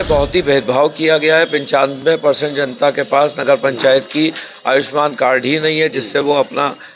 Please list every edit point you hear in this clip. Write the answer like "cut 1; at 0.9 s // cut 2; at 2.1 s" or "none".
none